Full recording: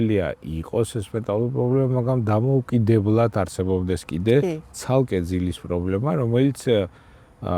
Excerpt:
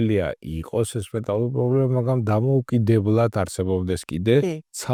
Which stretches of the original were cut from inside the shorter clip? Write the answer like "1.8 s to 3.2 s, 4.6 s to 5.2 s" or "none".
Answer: none

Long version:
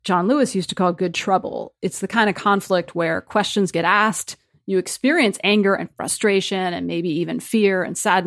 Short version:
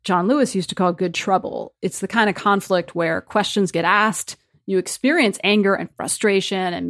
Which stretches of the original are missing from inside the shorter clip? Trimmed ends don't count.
none

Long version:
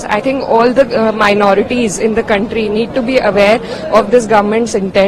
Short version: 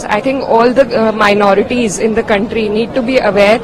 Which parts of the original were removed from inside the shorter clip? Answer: none

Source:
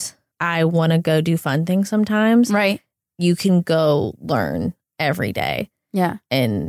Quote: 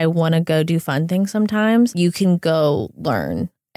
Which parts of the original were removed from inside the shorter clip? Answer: 2.5 s to 3.2 s

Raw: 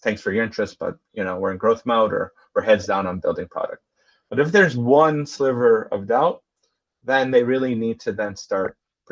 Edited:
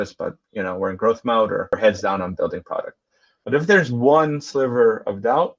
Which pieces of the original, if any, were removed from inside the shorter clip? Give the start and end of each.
2.3 s to 2.5 s

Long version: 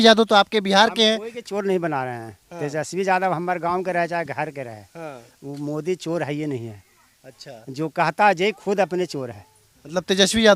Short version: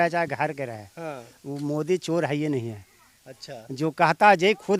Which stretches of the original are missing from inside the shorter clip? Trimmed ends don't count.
none

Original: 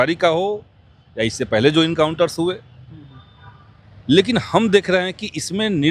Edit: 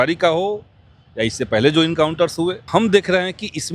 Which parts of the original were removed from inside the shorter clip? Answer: 2.7 s to 4.5 s

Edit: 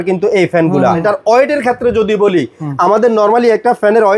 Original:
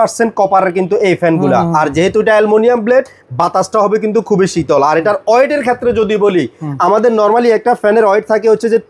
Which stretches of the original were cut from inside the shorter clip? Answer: 1.7 s to 5.0 s

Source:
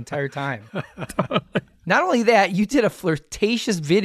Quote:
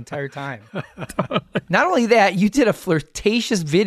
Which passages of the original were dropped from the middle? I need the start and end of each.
1.6 s to 1.8 s

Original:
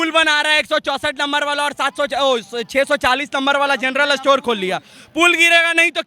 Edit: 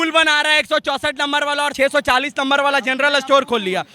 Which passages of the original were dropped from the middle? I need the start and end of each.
1.7 s to 2.7 s

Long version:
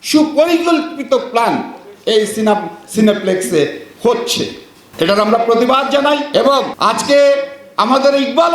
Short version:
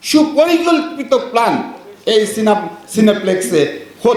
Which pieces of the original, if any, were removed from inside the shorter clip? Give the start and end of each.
none

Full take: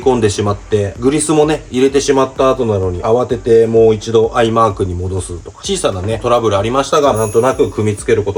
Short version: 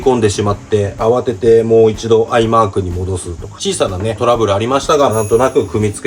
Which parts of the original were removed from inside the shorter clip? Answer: 0.9 s to 3.0 s

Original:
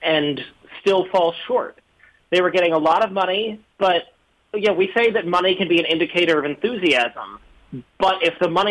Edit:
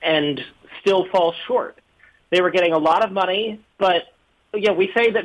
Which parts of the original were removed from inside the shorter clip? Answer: none

